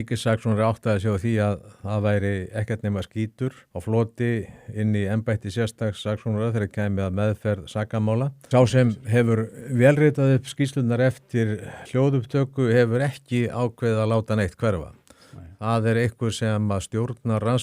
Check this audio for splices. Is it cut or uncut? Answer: cut